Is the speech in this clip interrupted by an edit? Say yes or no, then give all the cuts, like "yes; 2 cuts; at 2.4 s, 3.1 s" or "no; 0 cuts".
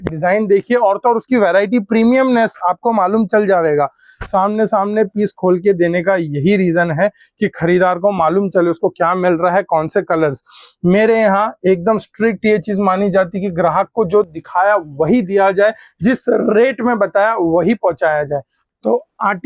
no; 0 cuts